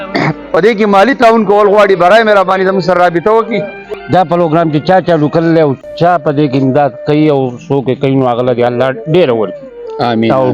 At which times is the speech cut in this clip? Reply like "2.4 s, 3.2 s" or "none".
3.9 s